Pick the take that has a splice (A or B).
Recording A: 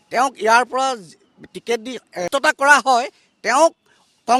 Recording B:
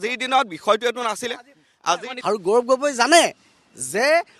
B